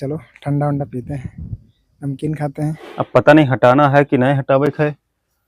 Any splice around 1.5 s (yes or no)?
no